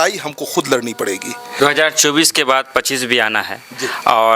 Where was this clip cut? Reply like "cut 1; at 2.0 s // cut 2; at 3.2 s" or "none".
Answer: cut 1; at 1.4 s